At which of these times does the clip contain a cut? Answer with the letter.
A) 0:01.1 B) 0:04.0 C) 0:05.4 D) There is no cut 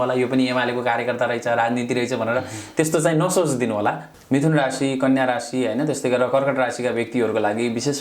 B